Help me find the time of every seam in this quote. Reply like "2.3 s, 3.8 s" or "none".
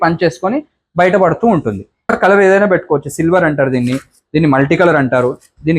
2.1 s